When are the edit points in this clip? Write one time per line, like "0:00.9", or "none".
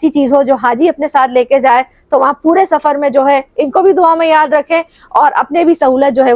none